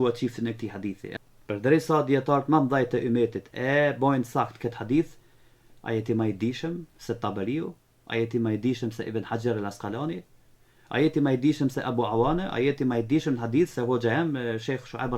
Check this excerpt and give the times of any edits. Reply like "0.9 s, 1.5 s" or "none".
1.1 s